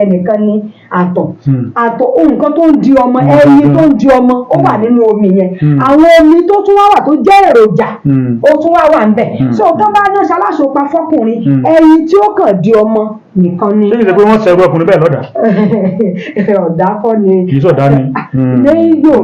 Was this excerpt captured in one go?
yes; 0 cuts

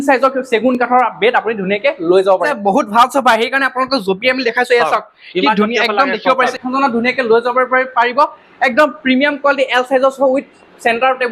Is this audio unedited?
no; 2 cuts; at 2.5 s, 6.5 s

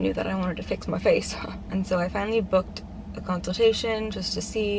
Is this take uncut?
yes; 0 cuts

